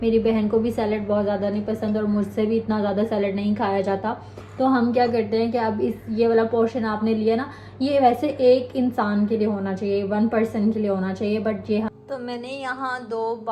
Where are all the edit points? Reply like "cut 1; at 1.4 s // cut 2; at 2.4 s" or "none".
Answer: cut 1; at 11.9 s